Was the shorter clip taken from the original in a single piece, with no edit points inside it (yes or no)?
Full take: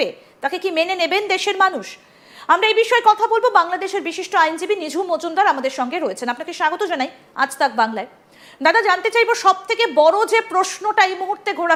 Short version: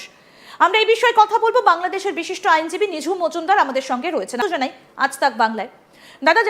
no